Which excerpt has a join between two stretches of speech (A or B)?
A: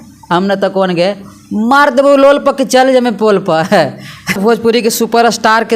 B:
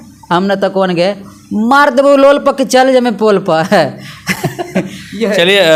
A